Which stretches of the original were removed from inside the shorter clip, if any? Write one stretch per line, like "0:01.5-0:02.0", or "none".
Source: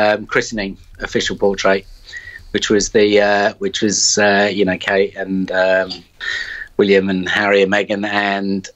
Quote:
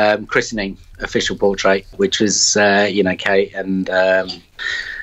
0:01.9-0:03.6